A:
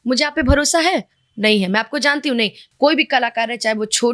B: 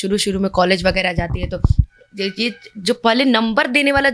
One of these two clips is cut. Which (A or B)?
A